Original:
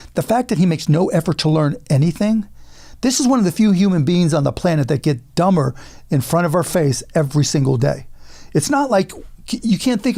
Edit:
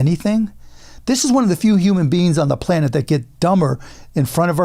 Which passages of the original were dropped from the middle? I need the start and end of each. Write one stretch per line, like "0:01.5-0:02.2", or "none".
none